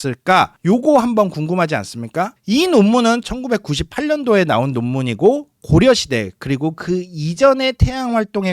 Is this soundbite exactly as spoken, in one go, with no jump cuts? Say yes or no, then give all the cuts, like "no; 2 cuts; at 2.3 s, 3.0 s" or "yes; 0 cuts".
no; 1 cut; at 2.4 s